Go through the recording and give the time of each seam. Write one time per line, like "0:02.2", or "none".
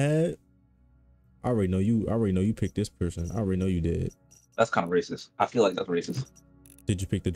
none

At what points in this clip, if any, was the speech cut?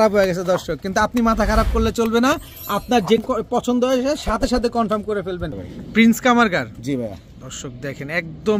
0:03.2
0:05.7

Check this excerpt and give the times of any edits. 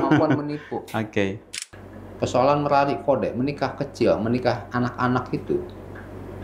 0:01.5

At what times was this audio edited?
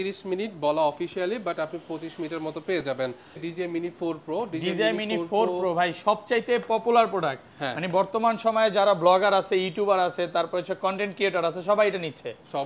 0:03.4

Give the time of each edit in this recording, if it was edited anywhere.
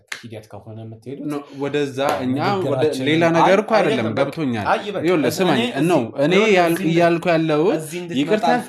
none

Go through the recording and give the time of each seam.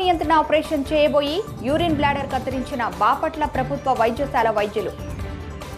none

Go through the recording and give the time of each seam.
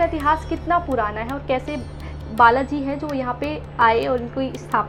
none

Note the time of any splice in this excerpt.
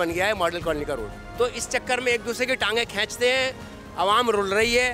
0:01.2

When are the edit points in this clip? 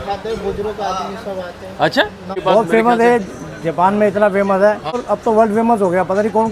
0:02.3
0:04.9

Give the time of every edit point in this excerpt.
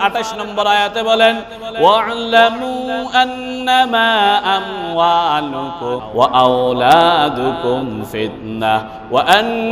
0:06.0

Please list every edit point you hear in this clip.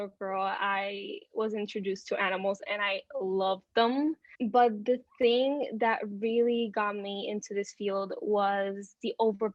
0:04.3

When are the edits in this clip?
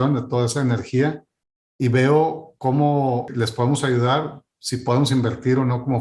0:03.3

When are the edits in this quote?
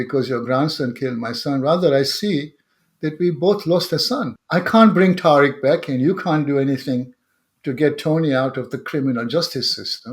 0:04.4

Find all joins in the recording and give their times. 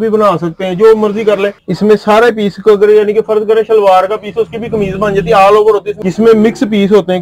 0:01.6
0:05.9

